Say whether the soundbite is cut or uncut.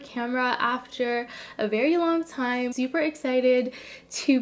cut